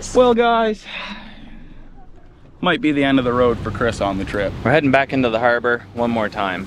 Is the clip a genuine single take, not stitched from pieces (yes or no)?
no